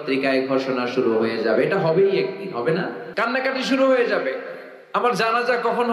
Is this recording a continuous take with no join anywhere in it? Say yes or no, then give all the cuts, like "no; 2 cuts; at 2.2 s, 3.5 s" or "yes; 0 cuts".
no; 1 cut; at 3.0 s